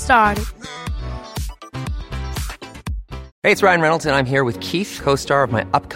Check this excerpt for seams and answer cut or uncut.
cut